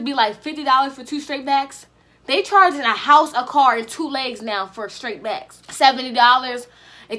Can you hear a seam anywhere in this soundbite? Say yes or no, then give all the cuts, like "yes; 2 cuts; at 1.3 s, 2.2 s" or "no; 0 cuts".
yes; 1 cut; at 5.6 s